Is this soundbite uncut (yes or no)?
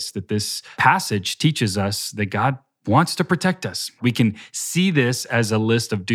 no